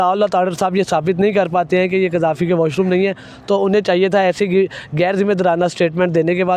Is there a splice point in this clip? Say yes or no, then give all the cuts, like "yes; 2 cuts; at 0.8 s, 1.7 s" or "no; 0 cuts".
no; 0 cuts